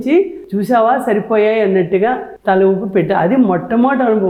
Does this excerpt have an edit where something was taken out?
no; 0 cuts

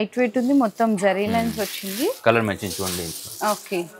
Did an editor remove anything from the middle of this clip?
no; 0 cuts

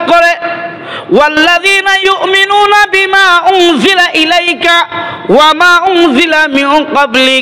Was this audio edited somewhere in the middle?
no; 0 cuts

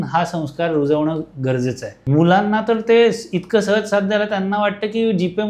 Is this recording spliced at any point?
yes; 1 cut; at 1.9 s

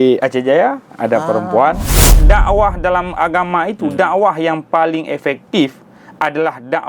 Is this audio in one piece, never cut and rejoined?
no; 1 cut; at 2.1 s

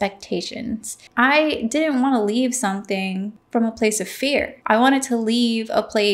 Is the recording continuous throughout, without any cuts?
no; 3 cuts; at 1.0 s, 3.4 s, 4.5 s

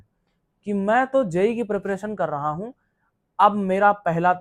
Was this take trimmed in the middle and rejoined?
no; 0 cuts

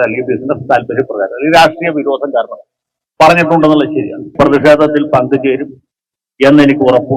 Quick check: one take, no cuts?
no; 1 cut; at 4.3 s

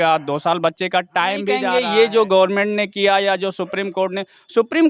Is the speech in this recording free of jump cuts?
no; 1 cut; at 1.6 s

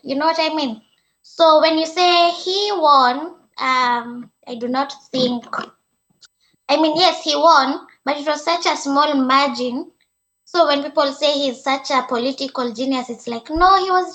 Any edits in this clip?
no; 0 cuts

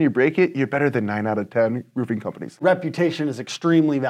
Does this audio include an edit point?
yes; 1 cut; at 2.6 s

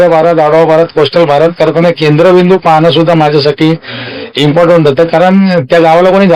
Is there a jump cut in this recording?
no; 0 cuts

